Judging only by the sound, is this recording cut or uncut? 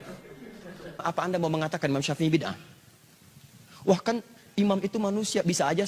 cut